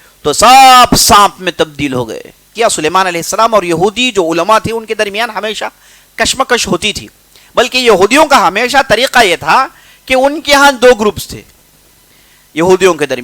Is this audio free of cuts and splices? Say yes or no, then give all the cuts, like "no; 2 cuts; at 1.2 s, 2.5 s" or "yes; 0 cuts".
no; 1 cut; at 2.5 s